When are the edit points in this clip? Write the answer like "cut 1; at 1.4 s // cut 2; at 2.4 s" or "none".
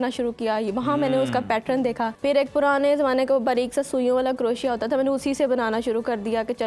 cut 1; at 2.1 s